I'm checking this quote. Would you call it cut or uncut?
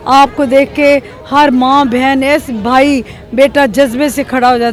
uncut